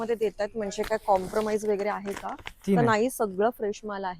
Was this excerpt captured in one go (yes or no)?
yes